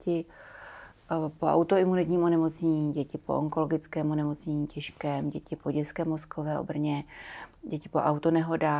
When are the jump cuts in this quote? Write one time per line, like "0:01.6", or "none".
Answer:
none